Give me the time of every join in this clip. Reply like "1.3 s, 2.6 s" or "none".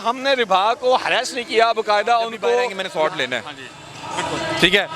2.8 s